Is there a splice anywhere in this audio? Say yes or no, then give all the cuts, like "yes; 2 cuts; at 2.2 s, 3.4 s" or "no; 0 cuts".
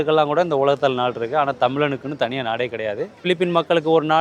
yes; 1 cut; at 3.2 s